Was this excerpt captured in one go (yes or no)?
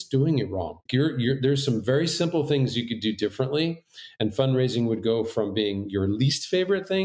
yes